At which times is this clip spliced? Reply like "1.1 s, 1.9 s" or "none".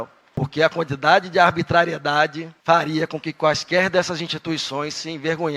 none